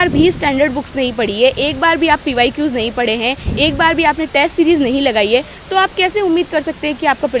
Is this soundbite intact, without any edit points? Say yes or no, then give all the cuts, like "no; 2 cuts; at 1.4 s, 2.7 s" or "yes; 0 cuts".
yes; 0 cuts